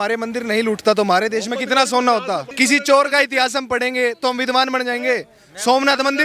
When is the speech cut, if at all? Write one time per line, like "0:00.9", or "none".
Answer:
0:02.5